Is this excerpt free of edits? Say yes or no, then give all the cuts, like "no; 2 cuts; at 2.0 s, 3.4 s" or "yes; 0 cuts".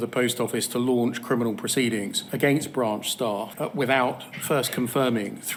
yes; 0 cuts